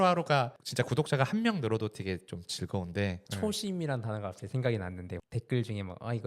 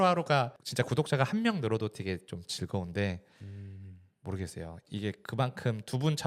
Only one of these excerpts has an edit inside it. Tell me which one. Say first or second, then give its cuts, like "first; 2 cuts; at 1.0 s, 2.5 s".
first; 2 cuts; at 3.3 s, 5.1 s